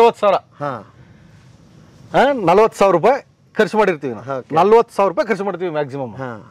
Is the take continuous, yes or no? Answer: yes